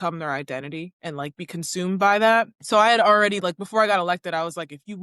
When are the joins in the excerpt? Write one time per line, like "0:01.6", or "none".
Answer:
0:00.9
0:02.6